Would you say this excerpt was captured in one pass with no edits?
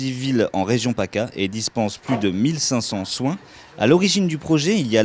no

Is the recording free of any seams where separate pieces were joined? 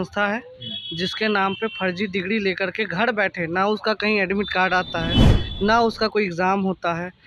yes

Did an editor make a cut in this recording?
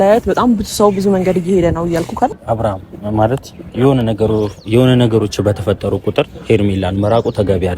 yes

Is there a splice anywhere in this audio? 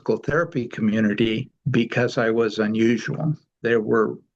yes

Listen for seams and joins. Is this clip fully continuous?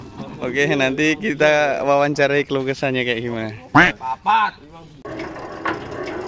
no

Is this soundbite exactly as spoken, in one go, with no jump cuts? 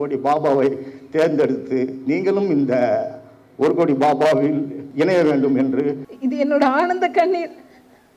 no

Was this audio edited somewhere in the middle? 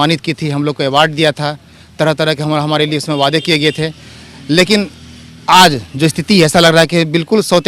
no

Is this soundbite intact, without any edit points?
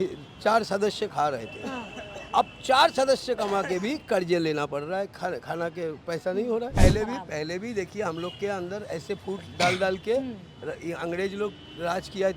no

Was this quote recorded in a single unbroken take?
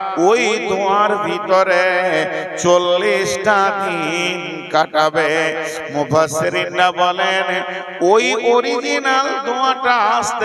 no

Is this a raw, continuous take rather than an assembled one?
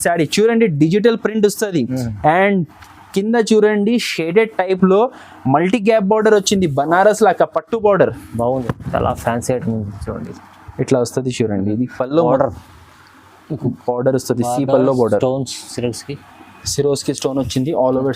no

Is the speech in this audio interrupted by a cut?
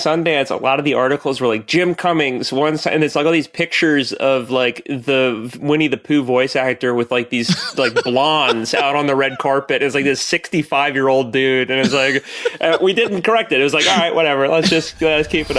no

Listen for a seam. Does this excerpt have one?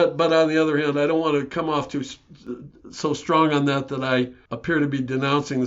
yes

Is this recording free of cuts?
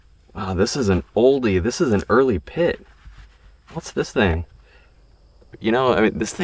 no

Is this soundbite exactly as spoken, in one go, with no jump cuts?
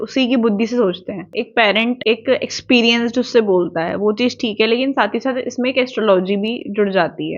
no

